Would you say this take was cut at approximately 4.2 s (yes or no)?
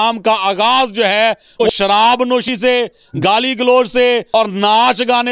yes